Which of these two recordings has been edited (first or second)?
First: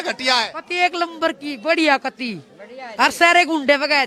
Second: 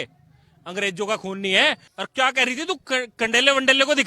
second